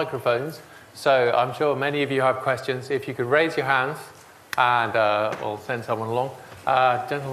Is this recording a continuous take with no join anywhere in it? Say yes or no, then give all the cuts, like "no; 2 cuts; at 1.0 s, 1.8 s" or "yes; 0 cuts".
yes; 0 cuts